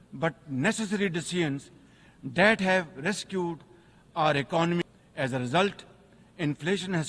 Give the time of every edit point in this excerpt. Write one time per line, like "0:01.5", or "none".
0:04.8